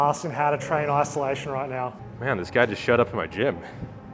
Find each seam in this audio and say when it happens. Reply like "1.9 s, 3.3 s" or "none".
2.1 s